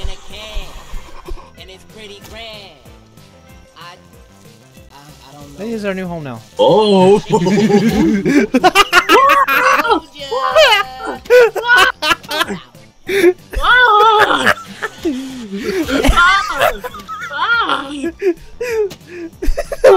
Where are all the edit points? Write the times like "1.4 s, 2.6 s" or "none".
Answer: none